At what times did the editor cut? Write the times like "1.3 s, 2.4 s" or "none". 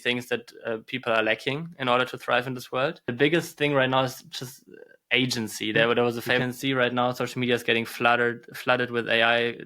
3.0 s, 6.5 s